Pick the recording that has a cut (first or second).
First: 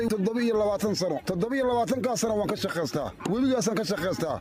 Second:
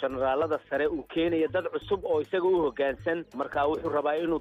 second